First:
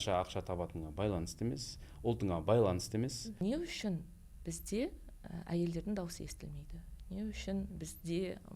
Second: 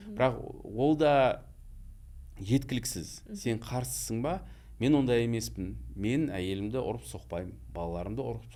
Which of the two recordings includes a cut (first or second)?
first